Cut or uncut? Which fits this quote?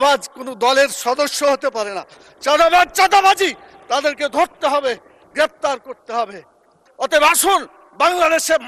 cut